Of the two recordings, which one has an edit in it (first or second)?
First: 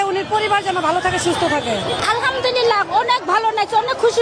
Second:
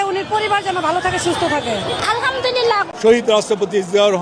second